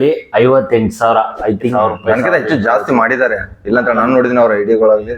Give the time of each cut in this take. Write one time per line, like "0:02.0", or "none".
0:01.7